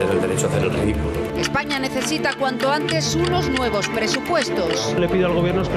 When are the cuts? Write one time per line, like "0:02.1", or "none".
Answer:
0:01.3